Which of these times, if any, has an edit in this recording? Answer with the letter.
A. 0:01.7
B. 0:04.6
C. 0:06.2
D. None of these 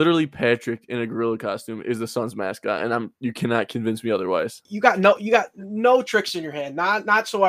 B